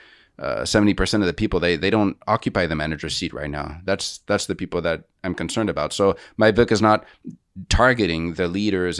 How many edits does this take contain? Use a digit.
0